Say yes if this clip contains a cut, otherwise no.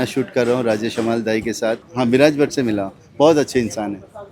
yes